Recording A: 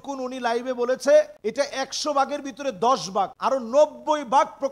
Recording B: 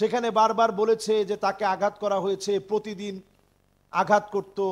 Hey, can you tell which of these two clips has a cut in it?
A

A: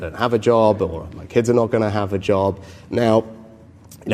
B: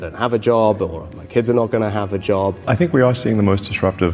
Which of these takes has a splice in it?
B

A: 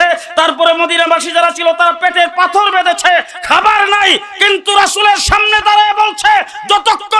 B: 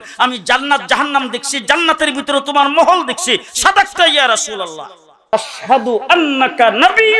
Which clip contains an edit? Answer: B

